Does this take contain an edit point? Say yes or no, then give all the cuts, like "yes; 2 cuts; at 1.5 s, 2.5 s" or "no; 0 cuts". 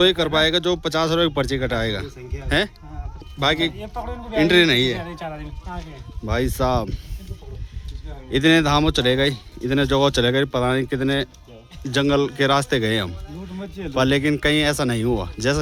no; 0 cuts